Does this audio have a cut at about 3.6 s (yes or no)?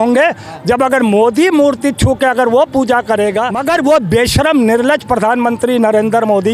yes